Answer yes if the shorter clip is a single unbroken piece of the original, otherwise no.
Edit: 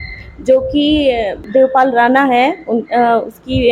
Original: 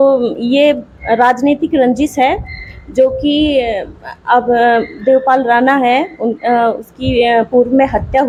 no